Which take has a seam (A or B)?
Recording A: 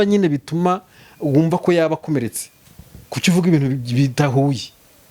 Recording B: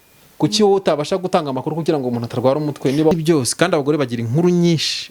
B